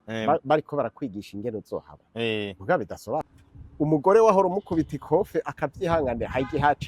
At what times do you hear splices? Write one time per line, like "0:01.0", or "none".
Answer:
0:03.2